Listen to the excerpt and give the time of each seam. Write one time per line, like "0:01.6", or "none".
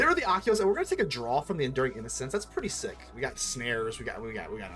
0:03.1